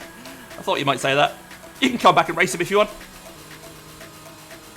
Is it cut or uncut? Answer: cut